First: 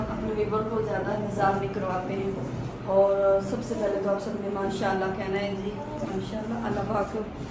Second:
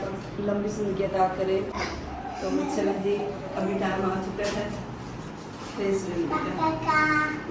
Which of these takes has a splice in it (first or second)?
second